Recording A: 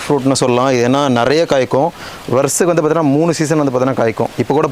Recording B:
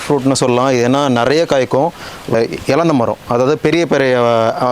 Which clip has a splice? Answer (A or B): B